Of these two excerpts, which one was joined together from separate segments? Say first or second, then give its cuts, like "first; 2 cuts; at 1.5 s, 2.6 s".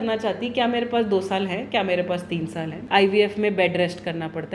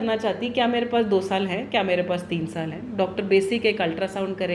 first; 1 cut; at 2.8 s